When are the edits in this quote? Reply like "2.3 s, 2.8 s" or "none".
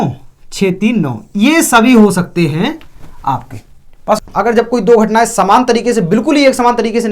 4.2 s

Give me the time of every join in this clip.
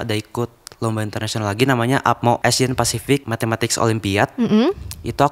2.4 s, 3.3 s

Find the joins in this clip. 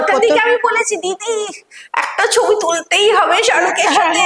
none

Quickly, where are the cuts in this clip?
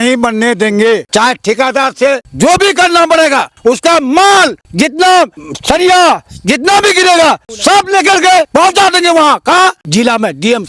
1.1 s, 2.3 s, 3.5 s, 4.6 s, 5.5 s, 7.5 s, 8.5 s, 9.8 s

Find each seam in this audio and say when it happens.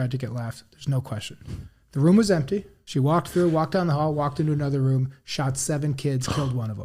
none

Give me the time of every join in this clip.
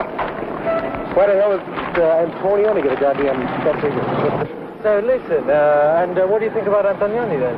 5.8 s

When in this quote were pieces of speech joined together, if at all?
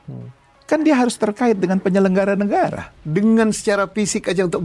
2.9 s

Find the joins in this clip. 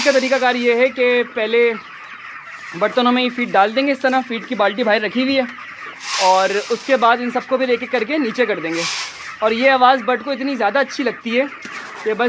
none

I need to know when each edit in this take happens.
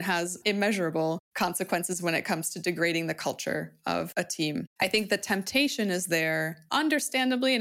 4.7 s

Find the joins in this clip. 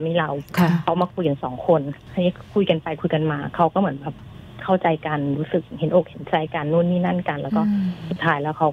none

